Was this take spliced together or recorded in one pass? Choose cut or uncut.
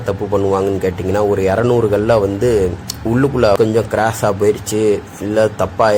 cut